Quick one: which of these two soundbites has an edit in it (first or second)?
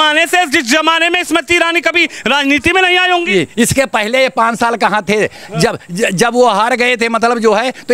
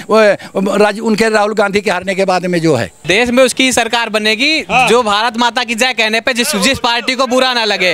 second